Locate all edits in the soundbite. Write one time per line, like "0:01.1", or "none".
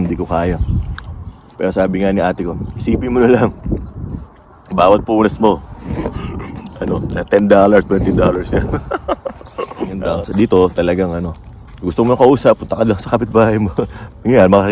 0:10.0